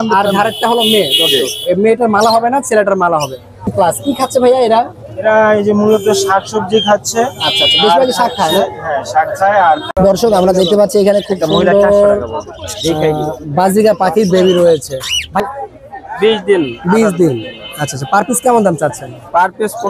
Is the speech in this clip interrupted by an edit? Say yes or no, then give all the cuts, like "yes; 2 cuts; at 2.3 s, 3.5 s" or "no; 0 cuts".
yes; 3 cuts; at 3.7 s, 9.8 s, 15.4 s